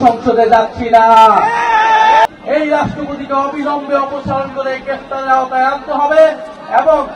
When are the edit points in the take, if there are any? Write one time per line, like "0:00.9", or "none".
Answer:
0:02.3